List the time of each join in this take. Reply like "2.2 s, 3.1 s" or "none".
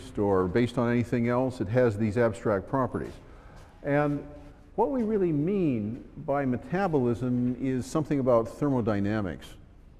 5.7 s